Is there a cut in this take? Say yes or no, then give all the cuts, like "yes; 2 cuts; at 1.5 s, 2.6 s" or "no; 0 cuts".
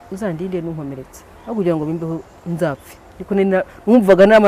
no; 0 cuts